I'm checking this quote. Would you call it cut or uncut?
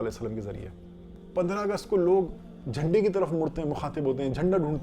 cut